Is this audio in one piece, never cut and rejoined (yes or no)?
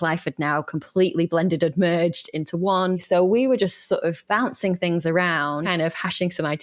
no